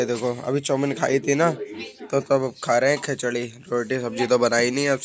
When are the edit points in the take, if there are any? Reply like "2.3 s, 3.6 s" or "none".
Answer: none